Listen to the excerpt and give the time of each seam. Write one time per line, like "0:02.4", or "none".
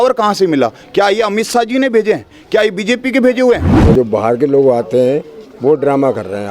0:03.7